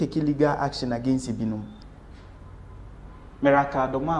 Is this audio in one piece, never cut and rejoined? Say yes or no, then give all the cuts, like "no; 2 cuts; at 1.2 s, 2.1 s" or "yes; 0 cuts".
no; 1 cut; at 1.8 s